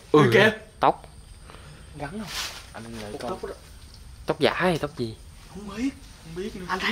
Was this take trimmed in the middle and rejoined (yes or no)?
yes